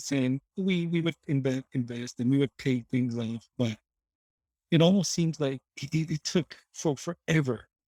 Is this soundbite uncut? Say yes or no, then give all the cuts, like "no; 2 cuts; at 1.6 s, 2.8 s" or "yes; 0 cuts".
yes; 0 cuts